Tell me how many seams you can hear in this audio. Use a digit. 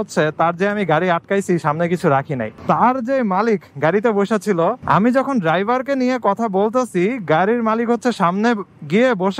2